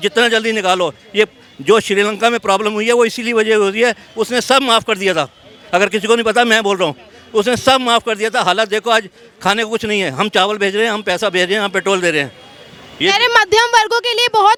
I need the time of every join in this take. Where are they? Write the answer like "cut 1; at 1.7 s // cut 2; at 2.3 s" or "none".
none